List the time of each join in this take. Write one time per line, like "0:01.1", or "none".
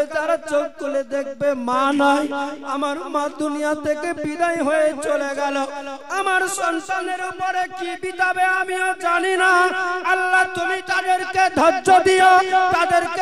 none